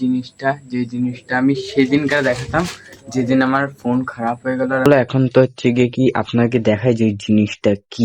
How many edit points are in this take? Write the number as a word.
one